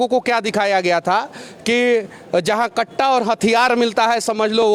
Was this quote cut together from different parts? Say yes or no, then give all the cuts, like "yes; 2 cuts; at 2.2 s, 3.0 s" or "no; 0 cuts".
no; 0 cuts